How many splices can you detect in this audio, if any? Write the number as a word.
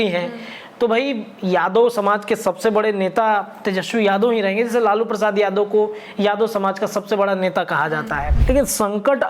one